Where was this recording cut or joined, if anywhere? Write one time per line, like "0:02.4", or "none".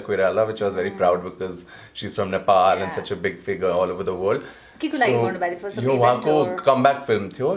none